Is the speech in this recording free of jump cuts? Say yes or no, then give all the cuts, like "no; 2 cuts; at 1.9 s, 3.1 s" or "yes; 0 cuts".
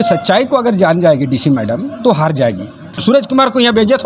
no; 1 cut; at 2.9 s